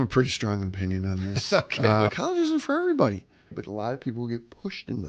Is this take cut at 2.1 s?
yes; 2 cuts; at 2.1 s, 3.5 s

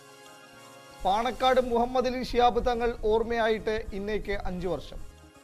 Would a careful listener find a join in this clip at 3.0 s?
no; 1 cut; at 1.0 s

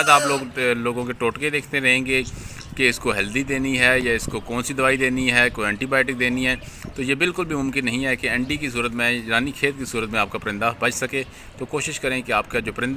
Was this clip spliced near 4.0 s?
no; 0 cuts

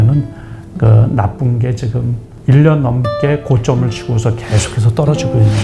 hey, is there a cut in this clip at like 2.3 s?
yes; 1 cut; at 2.3 s

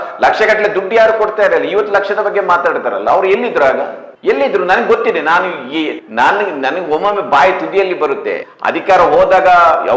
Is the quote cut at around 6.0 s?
yes; 2 cuts; at 6.0 s, 8.5 s

